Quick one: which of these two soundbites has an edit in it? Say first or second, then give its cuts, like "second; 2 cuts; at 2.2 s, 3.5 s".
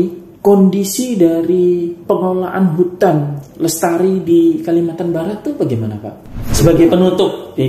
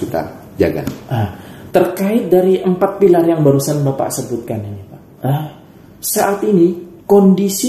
first; 2 cuts; at 2.0 s, 6.4 s